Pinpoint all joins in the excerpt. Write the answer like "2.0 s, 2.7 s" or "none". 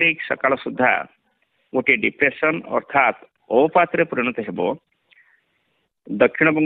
2.3 s